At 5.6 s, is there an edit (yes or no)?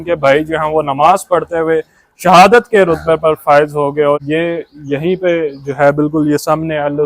no